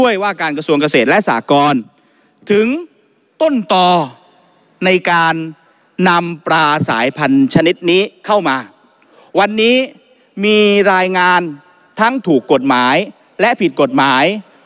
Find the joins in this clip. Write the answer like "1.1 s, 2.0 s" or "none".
none